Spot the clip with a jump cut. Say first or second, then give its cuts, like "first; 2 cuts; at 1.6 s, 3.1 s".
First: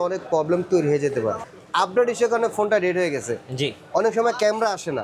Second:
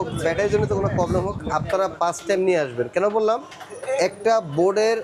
first; 1 cut; at 1.5 s